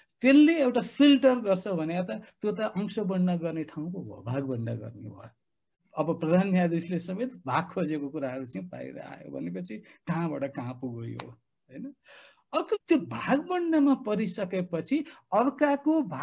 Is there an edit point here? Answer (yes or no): yes